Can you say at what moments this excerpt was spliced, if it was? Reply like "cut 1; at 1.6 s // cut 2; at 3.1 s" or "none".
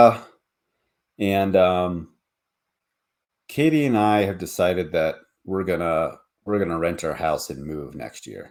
none